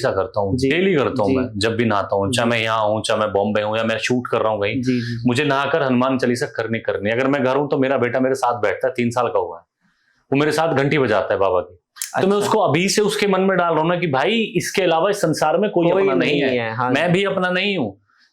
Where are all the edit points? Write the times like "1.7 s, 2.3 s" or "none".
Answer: none